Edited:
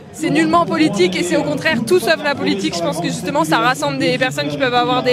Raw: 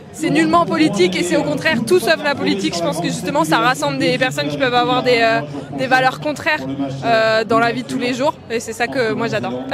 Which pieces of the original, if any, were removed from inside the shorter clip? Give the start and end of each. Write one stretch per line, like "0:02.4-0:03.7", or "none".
none